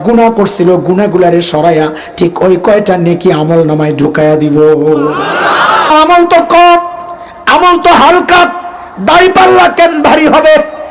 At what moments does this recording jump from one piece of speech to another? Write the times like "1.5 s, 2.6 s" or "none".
5.9 s